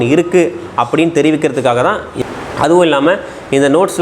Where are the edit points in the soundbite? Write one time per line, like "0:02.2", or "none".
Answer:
0:02.1